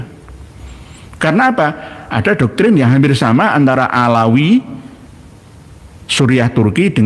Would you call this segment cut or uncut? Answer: uncut